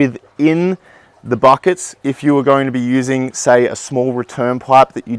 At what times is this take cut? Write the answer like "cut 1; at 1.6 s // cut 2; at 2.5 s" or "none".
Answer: none